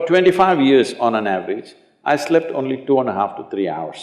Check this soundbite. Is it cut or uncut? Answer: uncut